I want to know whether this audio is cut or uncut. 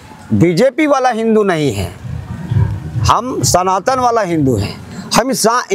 uncut